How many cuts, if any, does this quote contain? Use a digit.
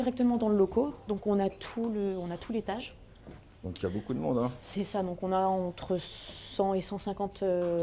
0